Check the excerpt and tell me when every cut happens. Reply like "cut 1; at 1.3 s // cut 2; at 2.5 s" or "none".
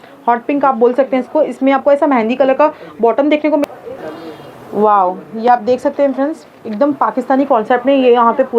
cut 1; at 3.6 s